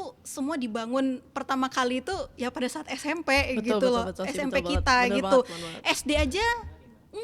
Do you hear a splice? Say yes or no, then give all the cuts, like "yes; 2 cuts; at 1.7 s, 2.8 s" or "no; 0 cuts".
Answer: no; 0 cuts